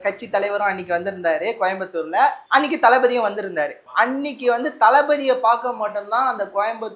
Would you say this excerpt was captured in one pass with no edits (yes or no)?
yes